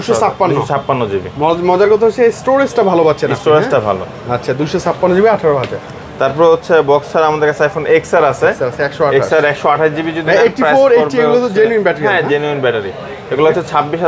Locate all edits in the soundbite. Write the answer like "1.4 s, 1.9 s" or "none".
none